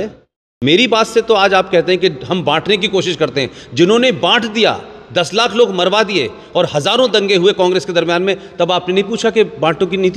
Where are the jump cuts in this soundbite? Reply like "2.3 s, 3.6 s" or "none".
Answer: none